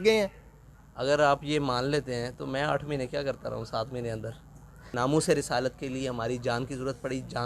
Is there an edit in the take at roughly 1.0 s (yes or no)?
no